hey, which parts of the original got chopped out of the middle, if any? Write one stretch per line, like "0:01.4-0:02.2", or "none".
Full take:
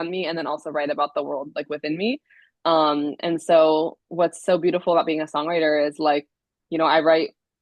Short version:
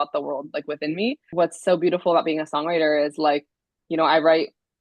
0:02.2-0:04.0